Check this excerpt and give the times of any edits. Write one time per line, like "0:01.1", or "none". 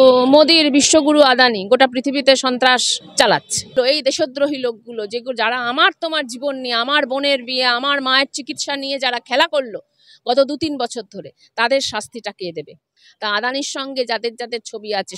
0:03.7
0:13.0